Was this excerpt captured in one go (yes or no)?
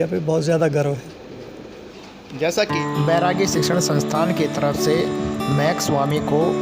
yes